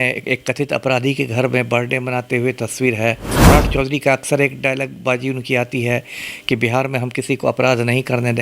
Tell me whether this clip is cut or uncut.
cut